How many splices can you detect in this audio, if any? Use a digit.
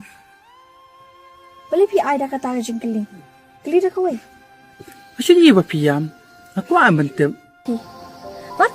1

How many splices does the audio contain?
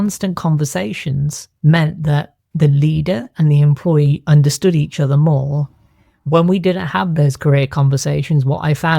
2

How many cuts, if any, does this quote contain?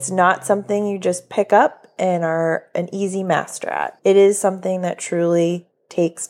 1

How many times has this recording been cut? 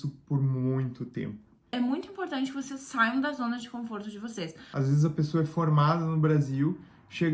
2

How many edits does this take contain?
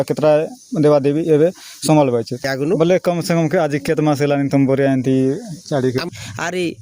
2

